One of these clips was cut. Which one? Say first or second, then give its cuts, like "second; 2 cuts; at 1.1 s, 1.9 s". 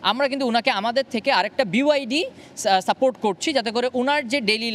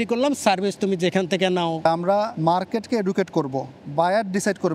second; 2 cuts; at 2.0 s, 3.7 s